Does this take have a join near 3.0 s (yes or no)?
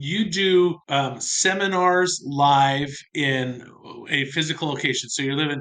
yes